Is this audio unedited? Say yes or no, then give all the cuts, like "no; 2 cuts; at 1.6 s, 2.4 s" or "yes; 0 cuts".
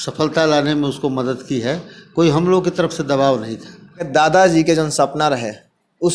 no; 1 cut; at 4.1 s